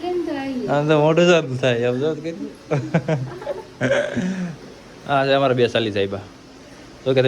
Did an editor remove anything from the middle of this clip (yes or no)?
no